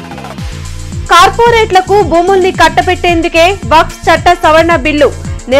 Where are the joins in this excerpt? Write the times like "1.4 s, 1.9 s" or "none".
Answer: 1.0 s